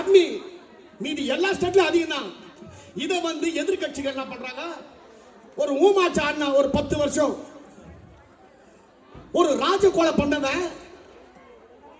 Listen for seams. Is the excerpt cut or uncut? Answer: uncut